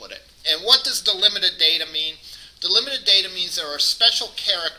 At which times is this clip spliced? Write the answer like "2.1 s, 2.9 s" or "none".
none